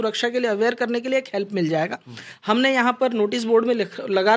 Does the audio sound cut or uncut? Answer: uncut